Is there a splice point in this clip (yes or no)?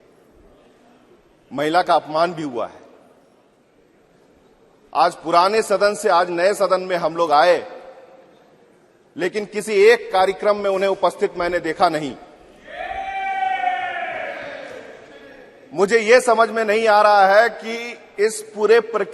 yes